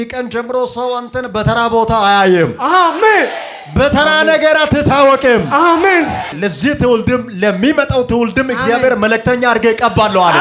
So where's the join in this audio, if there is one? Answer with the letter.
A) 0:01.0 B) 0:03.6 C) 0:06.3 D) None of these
C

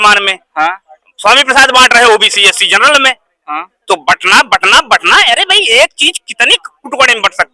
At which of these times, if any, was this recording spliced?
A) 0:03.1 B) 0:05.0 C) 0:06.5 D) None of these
D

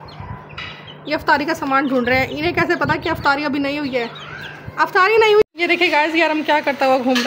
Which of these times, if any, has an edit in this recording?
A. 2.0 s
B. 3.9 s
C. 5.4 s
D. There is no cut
C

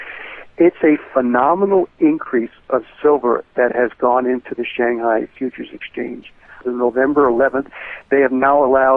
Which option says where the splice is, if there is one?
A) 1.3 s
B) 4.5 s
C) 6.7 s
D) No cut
C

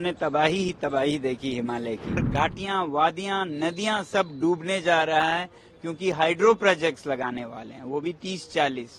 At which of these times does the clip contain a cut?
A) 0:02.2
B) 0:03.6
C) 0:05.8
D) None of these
A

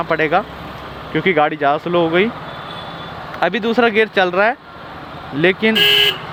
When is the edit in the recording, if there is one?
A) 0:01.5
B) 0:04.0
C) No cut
C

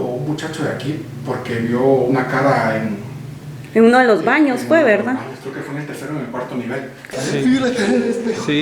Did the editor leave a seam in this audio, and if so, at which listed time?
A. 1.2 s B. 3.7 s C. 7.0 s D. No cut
C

